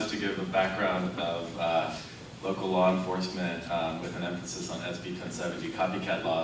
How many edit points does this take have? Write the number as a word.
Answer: one